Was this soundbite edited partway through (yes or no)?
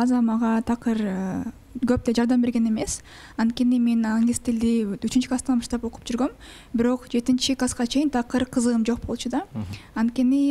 no